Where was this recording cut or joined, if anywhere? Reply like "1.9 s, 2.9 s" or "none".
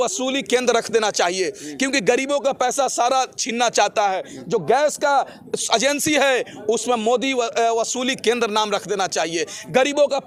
none

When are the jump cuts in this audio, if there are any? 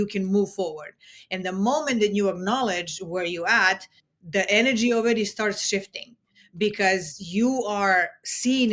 none

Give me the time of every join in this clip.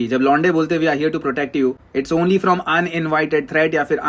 1.8 s

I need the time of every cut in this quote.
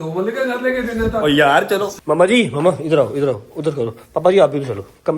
2.0 s

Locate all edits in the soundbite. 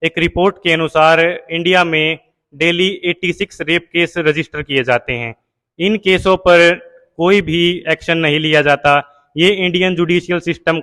none

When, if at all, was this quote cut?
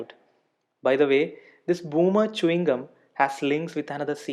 none

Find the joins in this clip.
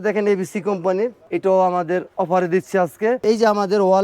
1.2 s, 3.2 s

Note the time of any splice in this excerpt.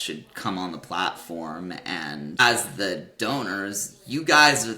2.4 s

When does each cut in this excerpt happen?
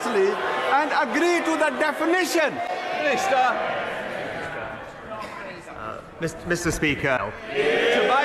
none

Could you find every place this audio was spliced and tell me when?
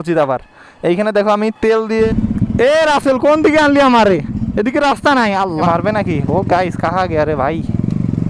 2.1 s, 5.6 s

